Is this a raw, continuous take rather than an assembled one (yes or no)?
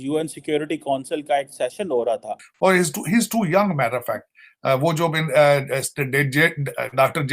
no